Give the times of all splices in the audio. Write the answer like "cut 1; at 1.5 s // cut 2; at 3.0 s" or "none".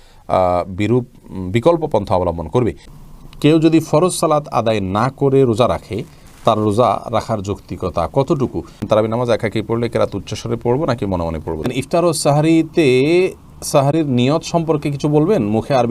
cut 1; at 2.9 s // cut 2; at 8.8 s // cut 3; at 11.7 s